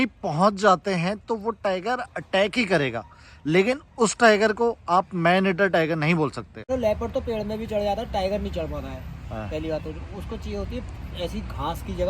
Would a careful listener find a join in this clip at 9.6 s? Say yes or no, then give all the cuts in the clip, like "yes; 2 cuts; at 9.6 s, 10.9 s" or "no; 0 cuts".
no; 1 cut; at 6.6 s